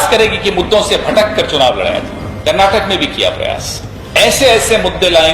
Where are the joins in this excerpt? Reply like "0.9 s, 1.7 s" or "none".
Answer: 2.2 s, 4.0 s